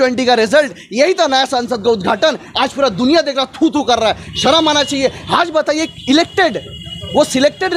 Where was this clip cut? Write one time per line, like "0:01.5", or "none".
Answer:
none